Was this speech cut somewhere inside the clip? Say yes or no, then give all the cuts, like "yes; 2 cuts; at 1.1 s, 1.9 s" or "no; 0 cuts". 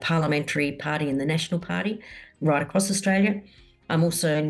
no; 0 cuts